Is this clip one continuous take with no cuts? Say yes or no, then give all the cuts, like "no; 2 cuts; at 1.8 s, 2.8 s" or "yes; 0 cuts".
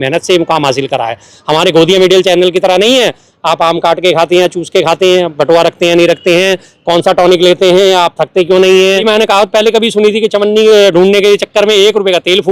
no; 1 cut; at 9.0 s